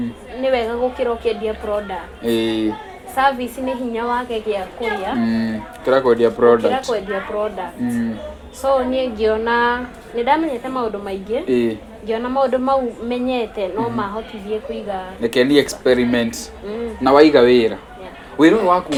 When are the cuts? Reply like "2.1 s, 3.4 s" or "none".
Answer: none

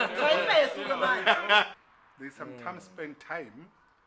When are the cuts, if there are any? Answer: 1.7 s

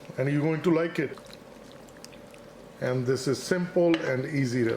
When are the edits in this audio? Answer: 1.2 s

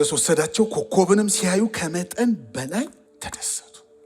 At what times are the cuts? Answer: 3.0 s

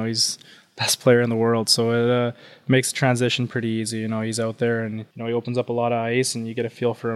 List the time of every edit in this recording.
5.1 s

